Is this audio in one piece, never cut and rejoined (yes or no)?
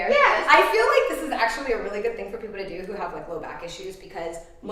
yes